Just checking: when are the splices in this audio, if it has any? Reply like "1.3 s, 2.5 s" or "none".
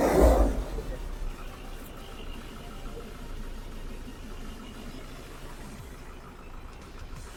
none